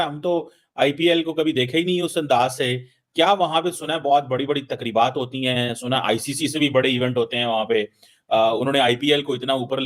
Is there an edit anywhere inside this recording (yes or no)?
no